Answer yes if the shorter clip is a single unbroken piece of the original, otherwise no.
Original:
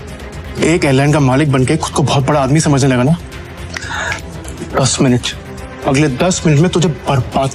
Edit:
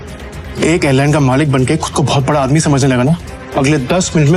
no